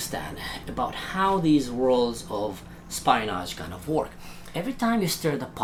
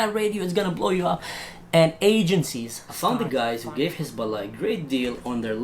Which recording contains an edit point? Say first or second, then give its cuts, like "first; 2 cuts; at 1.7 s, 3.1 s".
second; 1 cut; at 2.8 s